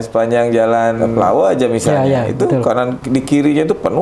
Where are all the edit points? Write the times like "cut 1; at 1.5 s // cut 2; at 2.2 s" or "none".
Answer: cut 1; at 1.0 s // cut 2; at 3.0 s